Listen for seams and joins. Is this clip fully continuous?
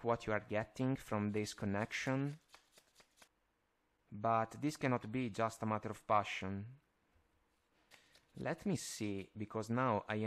no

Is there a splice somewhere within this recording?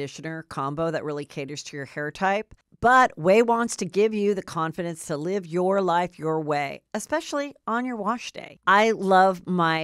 yes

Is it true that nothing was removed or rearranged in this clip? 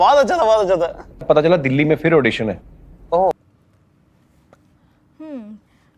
yes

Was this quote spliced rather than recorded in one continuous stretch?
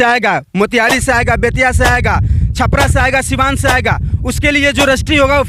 no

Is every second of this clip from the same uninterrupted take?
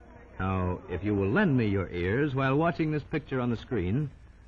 no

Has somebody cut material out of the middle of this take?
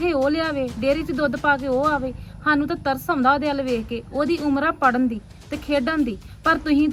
no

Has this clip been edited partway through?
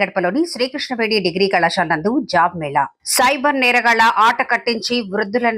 no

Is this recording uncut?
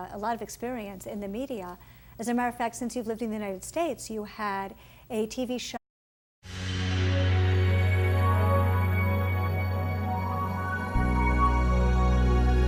yes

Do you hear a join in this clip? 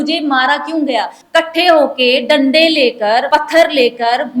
yes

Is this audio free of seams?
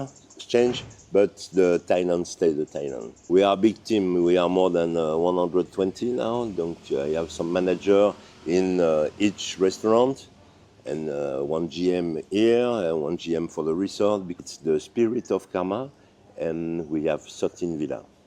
no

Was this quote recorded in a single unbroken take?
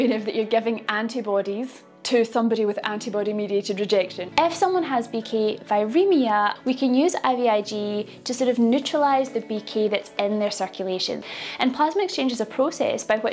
no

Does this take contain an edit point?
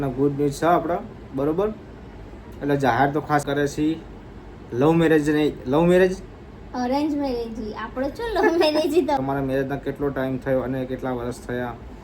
yes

